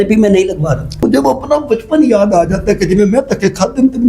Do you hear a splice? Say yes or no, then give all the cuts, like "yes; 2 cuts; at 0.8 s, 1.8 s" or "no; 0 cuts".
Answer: yes; 1 cut; at 1.0 s